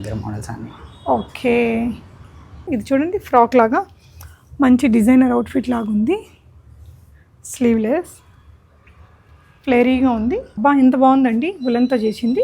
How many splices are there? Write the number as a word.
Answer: two